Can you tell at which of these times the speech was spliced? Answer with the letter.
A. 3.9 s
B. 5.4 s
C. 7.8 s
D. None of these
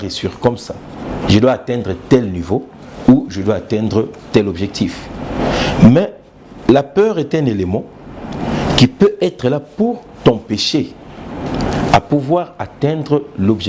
D